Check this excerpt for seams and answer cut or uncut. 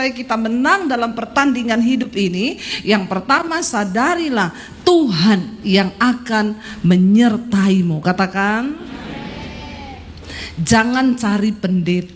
uncut